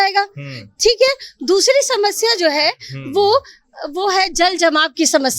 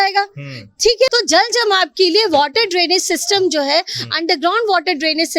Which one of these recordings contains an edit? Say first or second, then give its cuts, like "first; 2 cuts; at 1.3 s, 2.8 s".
second; 1 cut; at 1.1 s